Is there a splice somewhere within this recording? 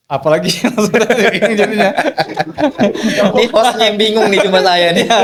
no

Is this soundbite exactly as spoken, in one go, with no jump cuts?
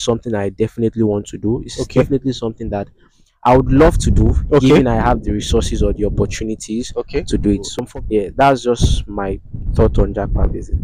yes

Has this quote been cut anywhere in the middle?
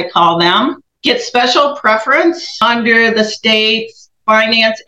yes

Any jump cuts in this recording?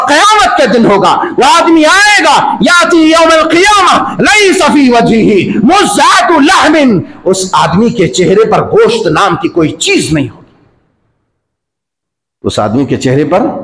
no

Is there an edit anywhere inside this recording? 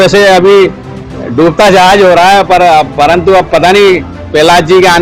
no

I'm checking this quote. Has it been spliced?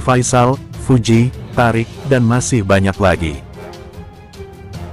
no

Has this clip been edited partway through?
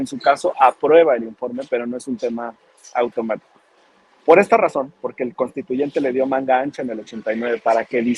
no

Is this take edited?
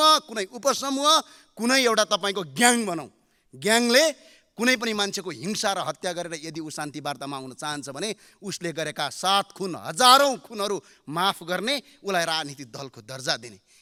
no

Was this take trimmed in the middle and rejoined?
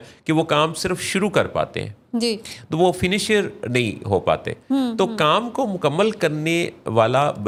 no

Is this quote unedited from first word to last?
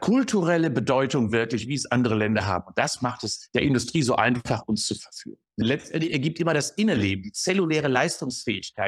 no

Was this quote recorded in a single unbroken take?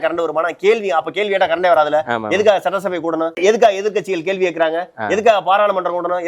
no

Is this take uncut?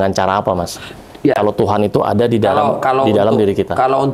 yes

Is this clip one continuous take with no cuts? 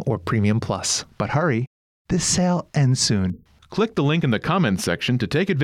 no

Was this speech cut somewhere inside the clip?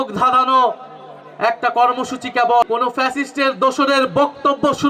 yes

